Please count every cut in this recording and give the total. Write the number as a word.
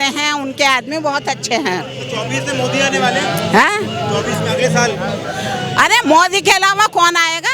zero